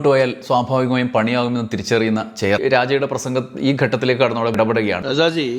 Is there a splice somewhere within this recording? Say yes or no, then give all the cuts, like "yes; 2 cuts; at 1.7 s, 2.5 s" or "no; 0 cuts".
no; 0 cuts